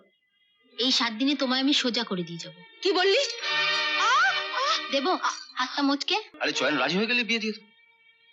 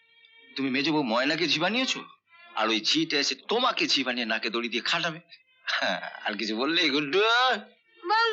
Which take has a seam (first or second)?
first